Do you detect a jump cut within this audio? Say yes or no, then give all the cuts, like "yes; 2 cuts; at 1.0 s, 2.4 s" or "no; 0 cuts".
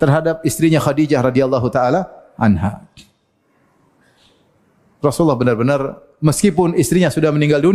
no; 0 cuts